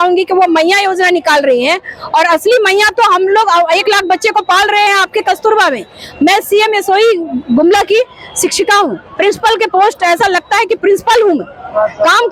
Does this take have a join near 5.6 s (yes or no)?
no